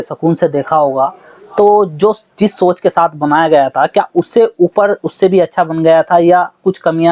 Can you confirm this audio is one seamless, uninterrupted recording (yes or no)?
yes